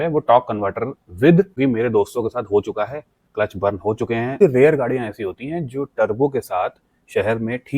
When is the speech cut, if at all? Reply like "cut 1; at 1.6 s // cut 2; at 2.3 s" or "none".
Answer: cut 1; at 1.5 s // cut 2; at 4.4 s